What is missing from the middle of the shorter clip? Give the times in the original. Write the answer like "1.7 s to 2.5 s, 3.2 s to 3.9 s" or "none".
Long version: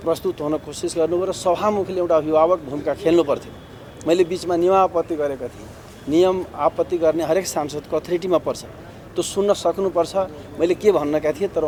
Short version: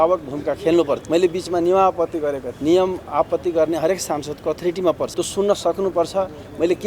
3.4 s to 4.0 s, 5.4 s to 5.9 s, 8.6 s to 9.1 s